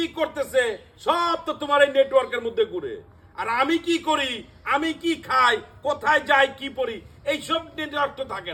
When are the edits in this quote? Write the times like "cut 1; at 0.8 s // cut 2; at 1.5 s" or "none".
none

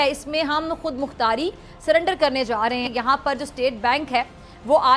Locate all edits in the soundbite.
cut 1; at 2.9 s

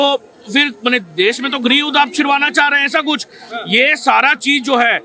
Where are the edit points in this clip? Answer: none

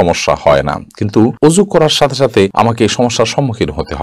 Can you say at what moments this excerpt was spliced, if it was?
cut 1; at 2.5 s

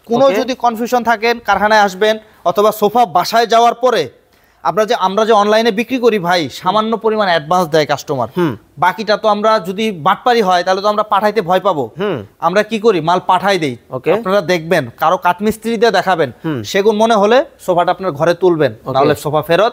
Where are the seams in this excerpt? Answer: none

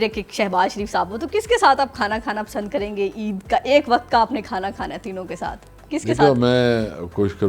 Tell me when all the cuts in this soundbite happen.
none

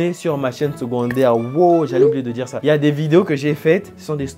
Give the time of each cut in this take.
cut 1; at 2.5 s

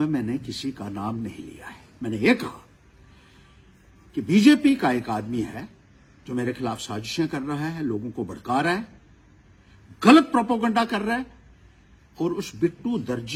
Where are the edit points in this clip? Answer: none

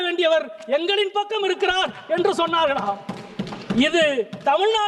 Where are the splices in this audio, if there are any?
none

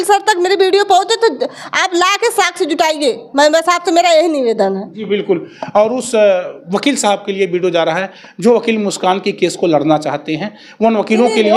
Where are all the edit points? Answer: none

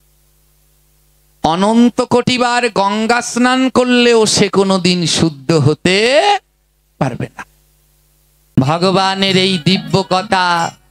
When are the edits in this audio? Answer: cut 1; at 8.6 s

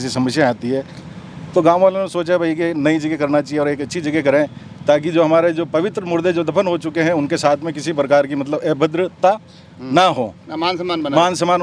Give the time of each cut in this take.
none

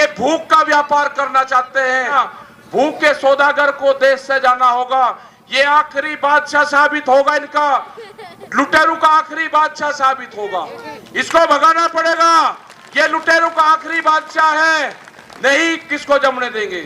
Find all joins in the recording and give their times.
cut 1; at 2.1 s

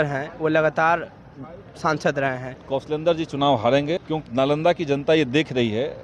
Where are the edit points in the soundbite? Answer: cut 1; at 2.5 s // cut 2; at 4.0 s

